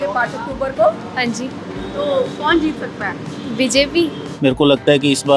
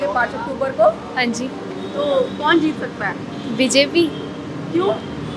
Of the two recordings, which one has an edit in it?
first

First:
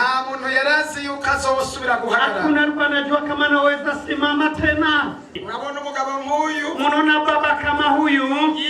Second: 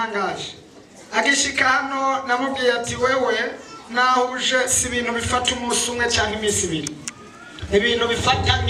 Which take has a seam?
first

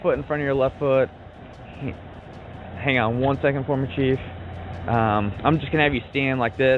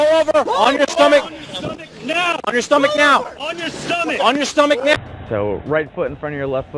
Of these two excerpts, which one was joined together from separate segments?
second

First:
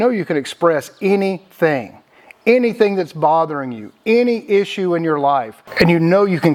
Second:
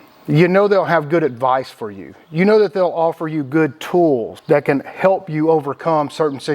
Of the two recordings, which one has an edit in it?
second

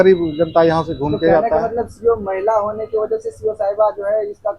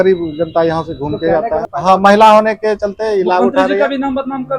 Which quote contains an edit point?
second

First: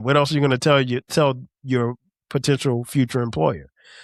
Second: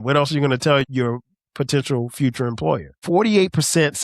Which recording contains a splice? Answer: second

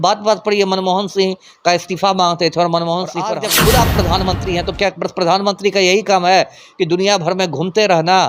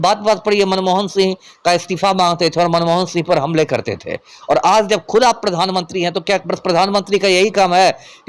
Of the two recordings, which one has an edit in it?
first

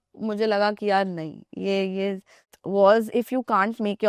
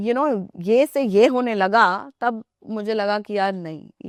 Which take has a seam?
first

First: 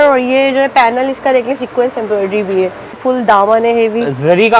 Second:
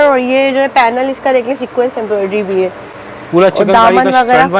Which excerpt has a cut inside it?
first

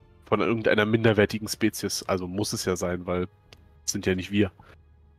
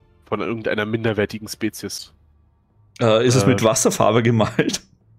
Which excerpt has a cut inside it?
second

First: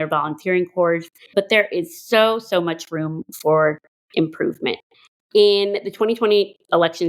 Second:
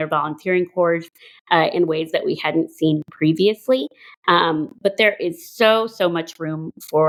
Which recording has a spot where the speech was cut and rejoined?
first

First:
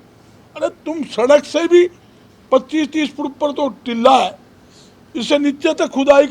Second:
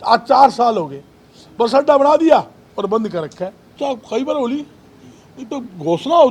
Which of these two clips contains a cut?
second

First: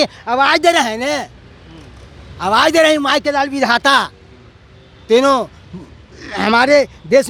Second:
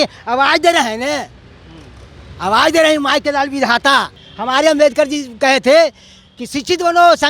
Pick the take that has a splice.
second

